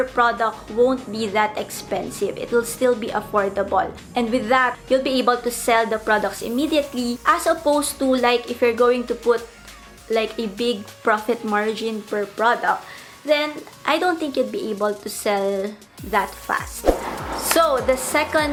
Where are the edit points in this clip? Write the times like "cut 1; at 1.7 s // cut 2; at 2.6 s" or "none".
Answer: none

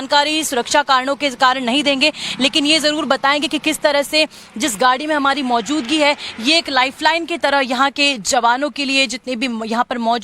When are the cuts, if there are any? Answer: cut 1; at 5.0 s

